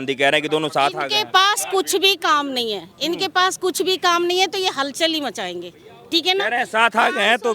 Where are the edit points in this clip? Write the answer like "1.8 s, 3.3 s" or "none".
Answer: none